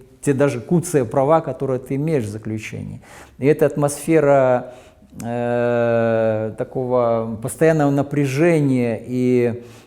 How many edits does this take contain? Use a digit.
0